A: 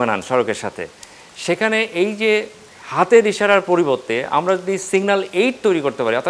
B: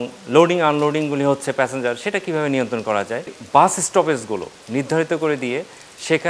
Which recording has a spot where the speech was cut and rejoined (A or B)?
B